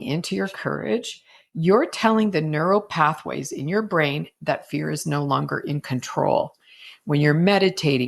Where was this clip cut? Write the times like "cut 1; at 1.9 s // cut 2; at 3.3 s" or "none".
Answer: cut 1; at 2.9 s

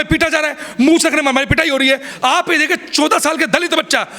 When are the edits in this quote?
cut 1; at 2.1 s

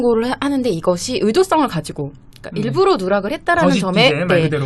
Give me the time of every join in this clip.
none

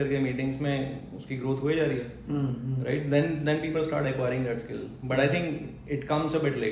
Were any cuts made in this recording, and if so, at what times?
none

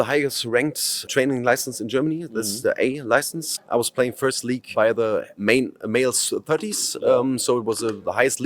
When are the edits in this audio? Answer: cut 1; at 1.0 s // cut 2; at 3.5 s

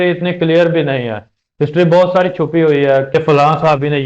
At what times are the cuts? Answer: cut 1; at 3.1 s

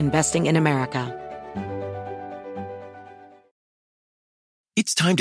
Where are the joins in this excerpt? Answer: cut 1; at 1.1 s

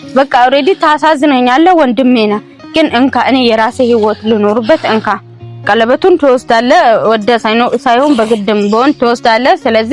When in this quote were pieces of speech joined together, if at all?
cut 1; at 5.6 s

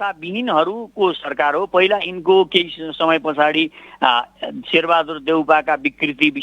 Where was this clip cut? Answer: cut 1; at 4.4 s

